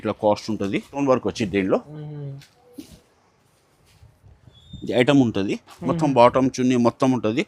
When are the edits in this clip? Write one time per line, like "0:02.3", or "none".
0:01.0